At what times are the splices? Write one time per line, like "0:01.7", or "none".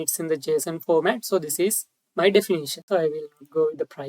0:02.8